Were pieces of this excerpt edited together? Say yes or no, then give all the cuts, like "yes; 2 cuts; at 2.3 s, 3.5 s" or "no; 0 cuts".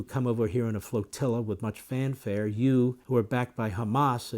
yes; 1 cut; at 3.0 s